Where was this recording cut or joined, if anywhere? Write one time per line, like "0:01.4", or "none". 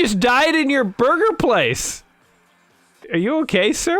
0:03.0